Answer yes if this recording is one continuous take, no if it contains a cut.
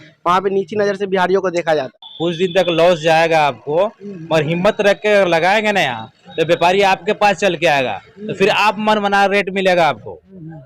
no